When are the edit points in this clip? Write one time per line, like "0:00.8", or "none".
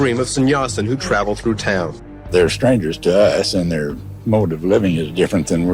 0:02.1